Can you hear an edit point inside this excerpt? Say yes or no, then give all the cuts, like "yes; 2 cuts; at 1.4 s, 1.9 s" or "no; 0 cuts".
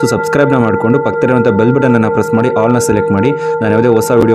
no; 0 cuts